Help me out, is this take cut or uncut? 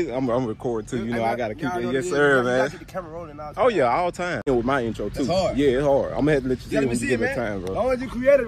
cut